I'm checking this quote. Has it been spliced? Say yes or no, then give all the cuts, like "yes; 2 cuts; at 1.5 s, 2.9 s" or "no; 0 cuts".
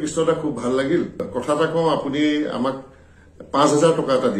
yes; 1 cut; at 1.3 s